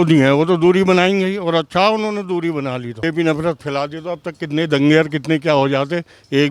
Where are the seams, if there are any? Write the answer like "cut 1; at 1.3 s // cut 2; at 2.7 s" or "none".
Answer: cut 1; at 3.0 s